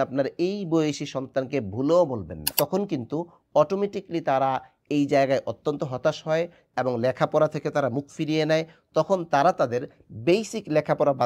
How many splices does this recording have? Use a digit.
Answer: 1